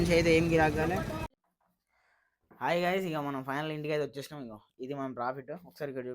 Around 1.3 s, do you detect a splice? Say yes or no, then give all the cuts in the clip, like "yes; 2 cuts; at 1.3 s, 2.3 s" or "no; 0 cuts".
yes; 1 cut; at 1.3 s